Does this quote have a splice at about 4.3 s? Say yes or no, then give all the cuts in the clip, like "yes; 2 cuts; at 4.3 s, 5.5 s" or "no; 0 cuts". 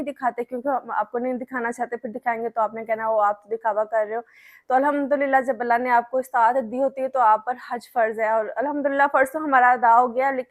no; 0 cuts